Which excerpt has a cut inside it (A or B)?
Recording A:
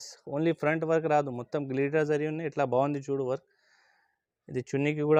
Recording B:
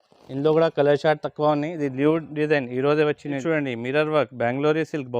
B